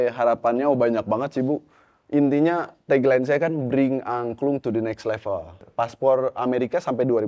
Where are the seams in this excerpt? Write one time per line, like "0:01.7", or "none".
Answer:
0:05.6